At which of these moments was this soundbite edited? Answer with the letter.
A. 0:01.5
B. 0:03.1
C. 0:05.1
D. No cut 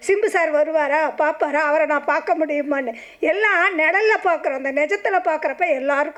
D